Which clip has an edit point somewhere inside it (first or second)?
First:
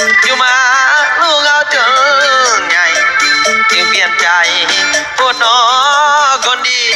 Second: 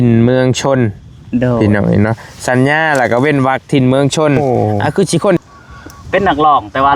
second